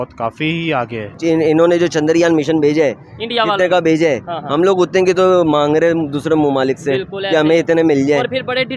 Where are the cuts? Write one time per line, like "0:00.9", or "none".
0:01.0